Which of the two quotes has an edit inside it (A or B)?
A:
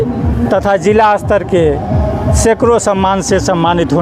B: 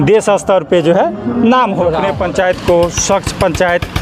B